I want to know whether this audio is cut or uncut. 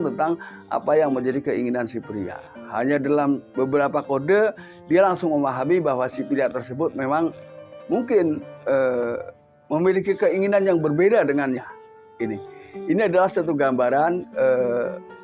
uncut